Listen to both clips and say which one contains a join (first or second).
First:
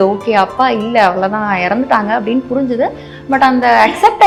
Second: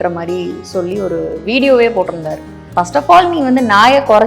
second